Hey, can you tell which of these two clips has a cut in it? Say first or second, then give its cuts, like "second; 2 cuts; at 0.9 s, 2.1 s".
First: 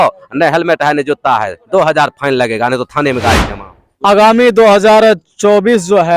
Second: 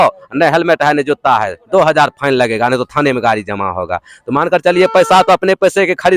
first; 1 cut; at 3.5 s